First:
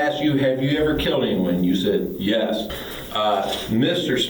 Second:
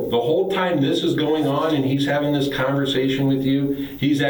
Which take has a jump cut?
first; 1 cut; at 2.7 s

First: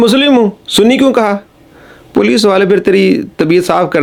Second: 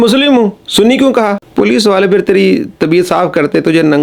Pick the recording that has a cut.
second; 1 cut; at 1.4 s

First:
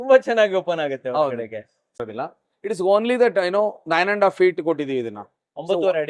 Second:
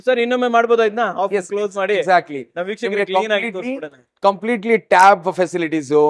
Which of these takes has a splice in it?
first; 1 cut; at 2.0 s

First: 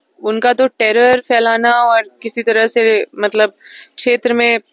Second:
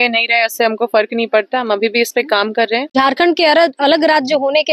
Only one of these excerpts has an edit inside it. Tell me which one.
second; 1 cut; at 2.9 s

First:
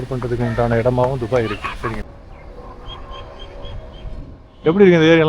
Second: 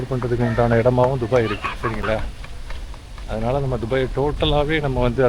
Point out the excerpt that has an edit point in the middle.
first; 1 cut; at 2.0 s

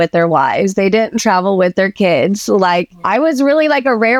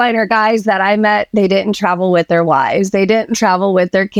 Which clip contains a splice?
first; 1 cut; at 3.0 s

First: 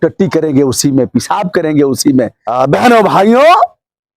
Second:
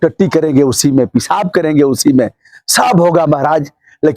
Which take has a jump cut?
first; 1 cut; at 2.4 s

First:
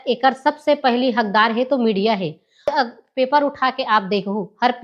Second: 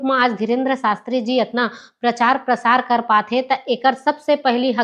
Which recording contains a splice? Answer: first; 1 cut; at 2.7 s

